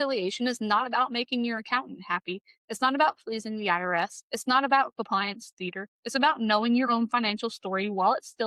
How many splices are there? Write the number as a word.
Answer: zero